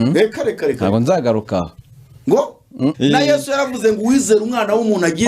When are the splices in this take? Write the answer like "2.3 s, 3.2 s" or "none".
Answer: 2.9 s